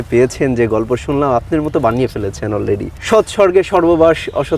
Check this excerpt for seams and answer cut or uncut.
cut